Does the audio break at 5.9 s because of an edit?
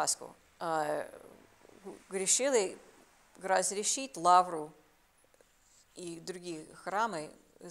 no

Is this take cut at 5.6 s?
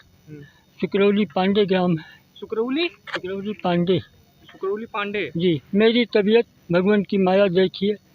yes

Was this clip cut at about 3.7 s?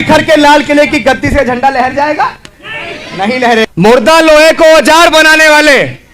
yes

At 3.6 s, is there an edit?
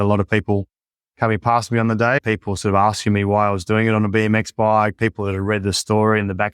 no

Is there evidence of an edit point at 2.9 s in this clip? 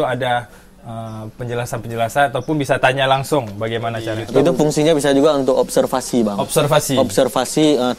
no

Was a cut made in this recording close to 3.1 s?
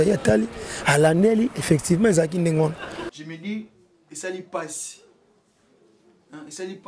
yes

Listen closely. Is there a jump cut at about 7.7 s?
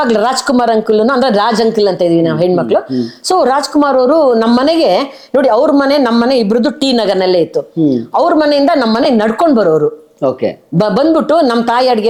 no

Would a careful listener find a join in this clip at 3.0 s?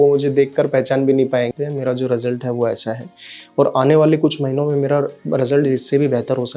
no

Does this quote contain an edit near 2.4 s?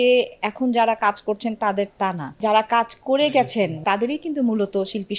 yes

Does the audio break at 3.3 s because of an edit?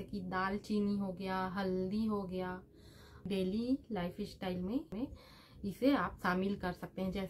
yes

